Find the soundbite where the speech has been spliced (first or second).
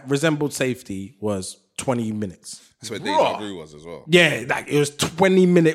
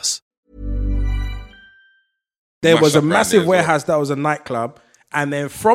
second